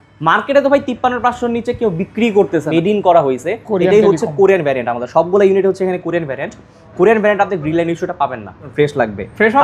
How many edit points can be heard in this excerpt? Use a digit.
2